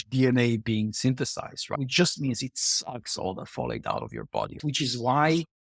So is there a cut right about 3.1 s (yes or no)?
no